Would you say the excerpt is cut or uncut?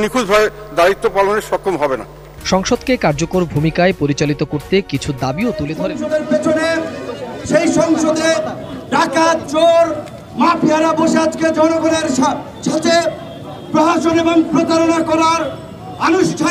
cut